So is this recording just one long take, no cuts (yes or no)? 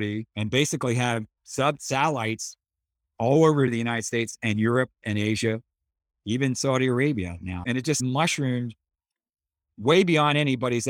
no